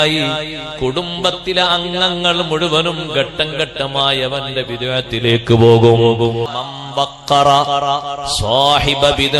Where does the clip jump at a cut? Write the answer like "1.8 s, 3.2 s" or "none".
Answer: 6.5 s